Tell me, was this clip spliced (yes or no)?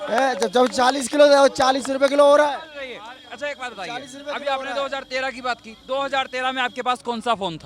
no